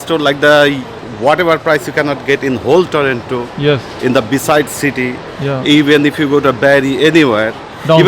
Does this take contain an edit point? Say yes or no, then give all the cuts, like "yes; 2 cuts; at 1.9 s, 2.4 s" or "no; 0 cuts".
no; 0 cuts